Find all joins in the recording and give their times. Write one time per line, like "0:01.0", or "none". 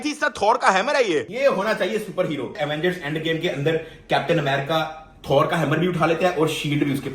0:01.3
0:02.6